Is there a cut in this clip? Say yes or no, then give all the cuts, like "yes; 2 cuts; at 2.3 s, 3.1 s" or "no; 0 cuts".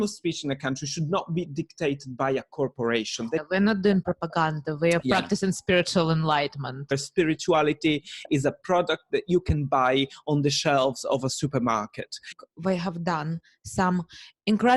yes; 3 cuts; at 3.4 s, 7.0 s, 12.3 s